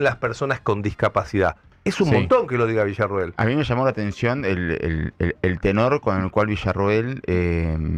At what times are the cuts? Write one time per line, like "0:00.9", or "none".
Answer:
none